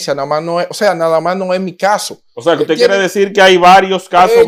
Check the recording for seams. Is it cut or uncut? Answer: uncut